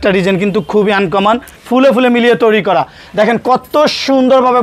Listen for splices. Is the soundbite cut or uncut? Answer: cut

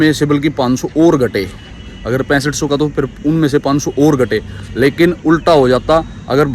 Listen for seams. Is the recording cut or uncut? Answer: uncut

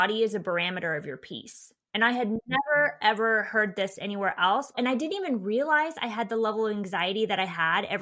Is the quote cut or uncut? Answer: cut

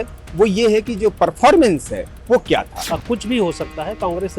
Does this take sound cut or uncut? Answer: cut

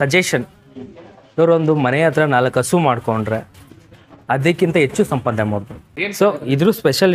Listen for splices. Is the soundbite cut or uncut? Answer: cut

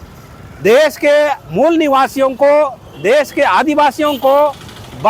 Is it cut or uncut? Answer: uncut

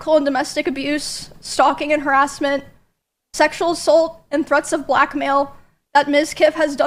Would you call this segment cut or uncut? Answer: uncut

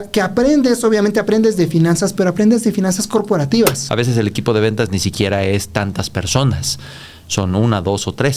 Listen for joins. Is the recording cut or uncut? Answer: cut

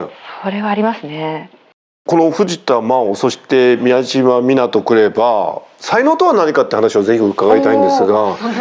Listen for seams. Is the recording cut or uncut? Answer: cut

